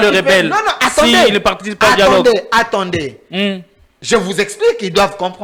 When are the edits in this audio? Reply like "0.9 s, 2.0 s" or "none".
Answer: none